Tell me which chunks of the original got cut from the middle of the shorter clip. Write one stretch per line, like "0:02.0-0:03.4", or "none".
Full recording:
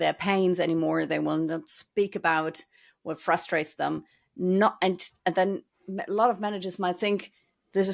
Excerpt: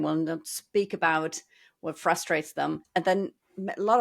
0:04.0-0:05.1